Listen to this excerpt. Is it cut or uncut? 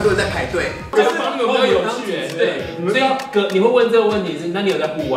cut